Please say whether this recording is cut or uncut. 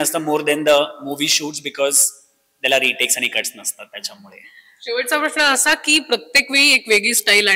uncut